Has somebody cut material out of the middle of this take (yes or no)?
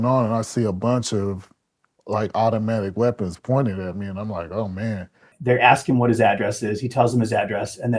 yes